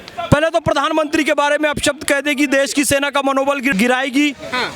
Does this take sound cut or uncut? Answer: cut